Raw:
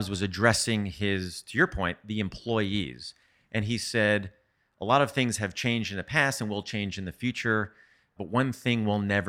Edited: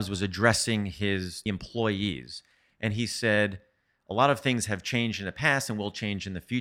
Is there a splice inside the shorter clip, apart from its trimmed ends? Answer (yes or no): yes